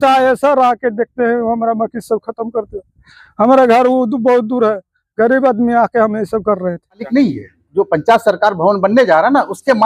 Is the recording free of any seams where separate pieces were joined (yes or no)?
no